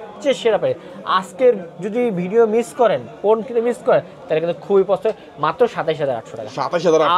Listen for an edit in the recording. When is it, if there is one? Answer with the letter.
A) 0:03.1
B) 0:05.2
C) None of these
C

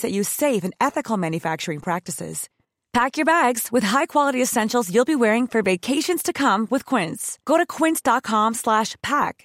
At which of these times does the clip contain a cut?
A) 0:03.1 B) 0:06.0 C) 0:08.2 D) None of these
D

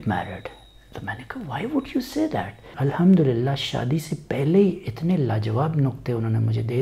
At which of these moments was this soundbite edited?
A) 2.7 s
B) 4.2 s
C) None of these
A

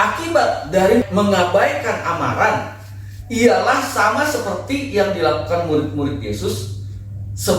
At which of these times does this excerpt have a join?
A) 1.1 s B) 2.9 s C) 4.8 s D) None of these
A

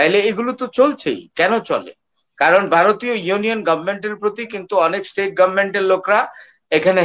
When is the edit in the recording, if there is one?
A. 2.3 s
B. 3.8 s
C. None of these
C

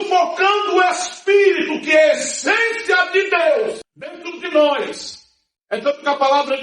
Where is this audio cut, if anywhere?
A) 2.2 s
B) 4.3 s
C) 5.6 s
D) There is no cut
B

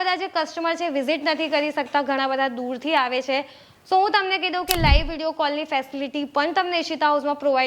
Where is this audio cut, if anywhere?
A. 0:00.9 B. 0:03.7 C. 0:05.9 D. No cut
D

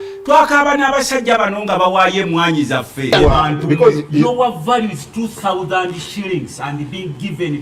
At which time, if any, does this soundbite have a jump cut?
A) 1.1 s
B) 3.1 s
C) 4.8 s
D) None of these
B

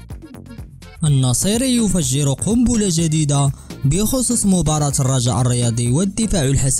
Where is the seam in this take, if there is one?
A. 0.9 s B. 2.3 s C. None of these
A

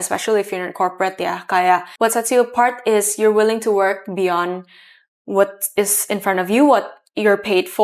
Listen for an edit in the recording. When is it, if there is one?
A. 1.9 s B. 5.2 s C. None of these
A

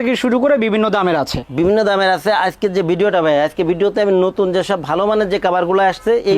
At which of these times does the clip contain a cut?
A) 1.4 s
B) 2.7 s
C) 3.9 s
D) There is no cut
A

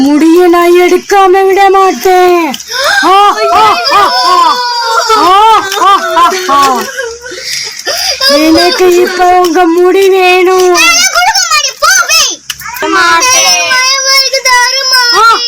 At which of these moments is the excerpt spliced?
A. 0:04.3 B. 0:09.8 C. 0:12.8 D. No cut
C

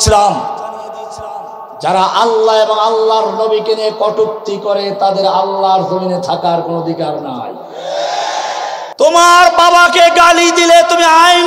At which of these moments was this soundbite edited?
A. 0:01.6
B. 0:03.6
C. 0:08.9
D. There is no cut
C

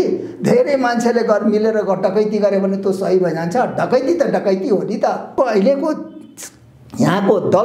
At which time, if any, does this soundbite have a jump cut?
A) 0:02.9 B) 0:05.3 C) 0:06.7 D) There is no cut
B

